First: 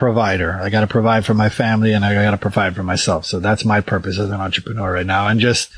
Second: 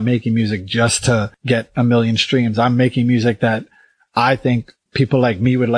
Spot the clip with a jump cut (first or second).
second